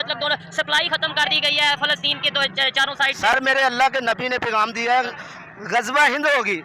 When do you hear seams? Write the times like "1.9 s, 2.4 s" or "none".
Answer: none